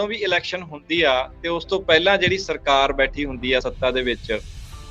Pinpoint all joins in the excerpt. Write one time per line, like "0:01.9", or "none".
none